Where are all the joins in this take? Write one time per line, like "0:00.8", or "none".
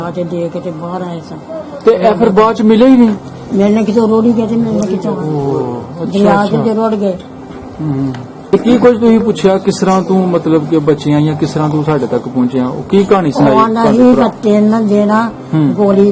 0:08.4